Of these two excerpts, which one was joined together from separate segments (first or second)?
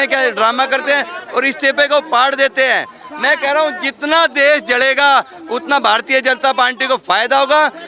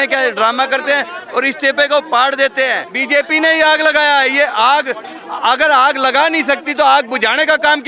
second